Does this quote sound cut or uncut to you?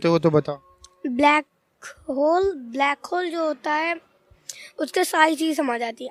uncut